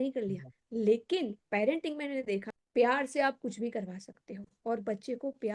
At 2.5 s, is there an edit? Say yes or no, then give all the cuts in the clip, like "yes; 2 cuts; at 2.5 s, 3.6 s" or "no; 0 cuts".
yes; 1 cut; at 2.5 s